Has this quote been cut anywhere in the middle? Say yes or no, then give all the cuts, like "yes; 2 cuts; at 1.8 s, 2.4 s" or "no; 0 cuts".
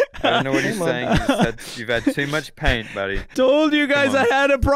yes; 1 cut; at 3.3 s